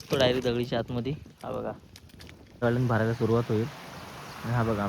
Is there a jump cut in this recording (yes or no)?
yes